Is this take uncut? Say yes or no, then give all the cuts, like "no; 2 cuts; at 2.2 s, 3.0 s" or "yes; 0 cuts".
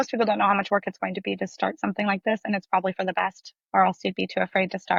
yes; 0 cuts